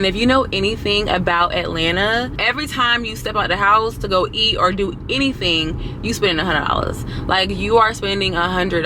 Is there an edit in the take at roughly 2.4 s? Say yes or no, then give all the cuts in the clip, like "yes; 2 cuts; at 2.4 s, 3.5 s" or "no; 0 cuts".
yes; 1 cut; at 2.4 s